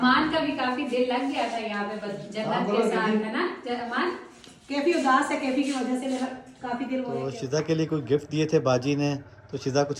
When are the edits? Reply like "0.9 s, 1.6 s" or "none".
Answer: 7.3 s